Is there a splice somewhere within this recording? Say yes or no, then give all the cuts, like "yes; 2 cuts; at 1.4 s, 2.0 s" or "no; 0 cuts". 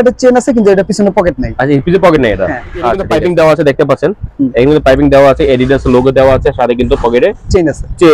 yes; 1 cut; at 3.1 s